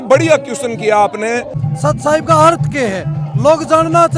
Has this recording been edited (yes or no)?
yes